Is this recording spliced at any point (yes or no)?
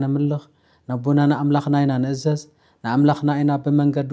no